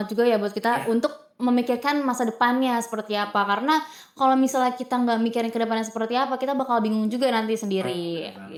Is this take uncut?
yes; 0 cuts

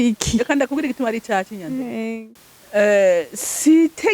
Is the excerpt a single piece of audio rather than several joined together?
no; 1 cut; at 2.2 s

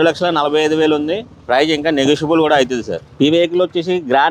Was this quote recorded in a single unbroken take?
yes; 0 cuts

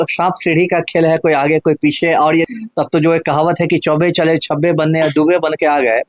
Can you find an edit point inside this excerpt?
yes; 1 cut; at 2.4 s

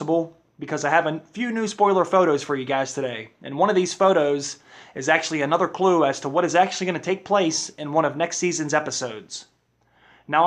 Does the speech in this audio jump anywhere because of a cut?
yes; 1 cut; at 7.5 s

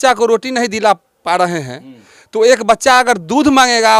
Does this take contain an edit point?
no; 0 cuts

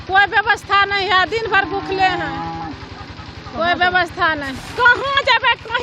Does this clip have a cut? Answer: yes; 1 cut; at 4.6 s

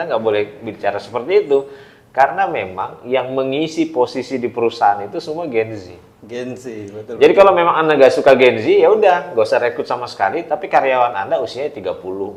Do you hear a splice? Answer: no; 0 cuts

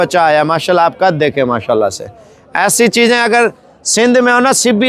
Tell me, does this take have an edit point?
no; 0 cuts

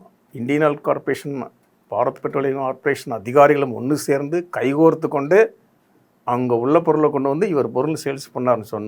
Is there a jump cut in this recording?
no; 0 cuts

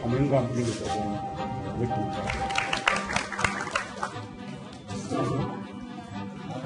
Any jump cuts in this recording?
no; 0 cuts

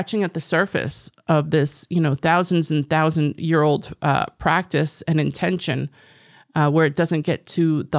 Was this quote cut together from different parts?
no; 0 cuts

